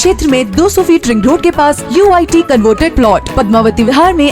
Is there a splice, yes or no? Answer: no